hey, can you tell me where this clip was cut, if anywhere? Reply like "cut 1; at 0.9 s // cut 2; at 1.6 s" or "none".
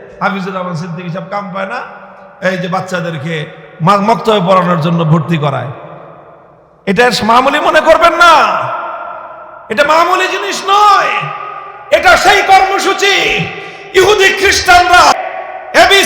cut 1; at 15.1 s